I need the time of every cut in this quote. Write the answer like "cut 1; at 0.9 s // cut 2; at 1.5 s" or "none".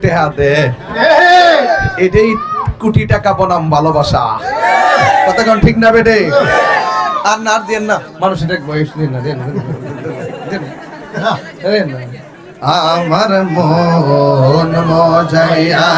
none